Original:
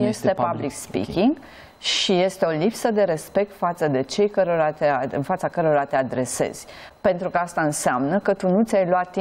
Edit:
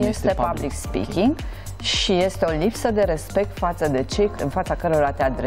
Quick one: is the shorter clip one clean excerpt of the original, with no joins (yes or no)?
no